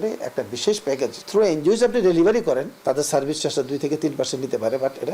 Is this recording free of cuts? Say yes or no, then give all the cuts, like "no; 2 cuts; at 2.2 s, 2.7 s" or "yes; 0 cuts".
no; 2 cuts; at 1.2 s, 2.7 s